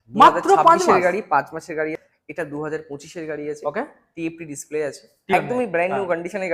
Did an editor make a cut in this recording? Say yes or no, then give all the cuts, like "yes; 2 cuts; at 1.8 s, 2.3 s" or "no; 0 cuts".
yes; 2 cuts; at 1.9 s, 5.3 s